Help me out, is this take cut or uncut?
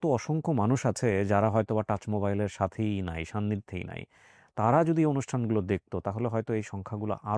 uncut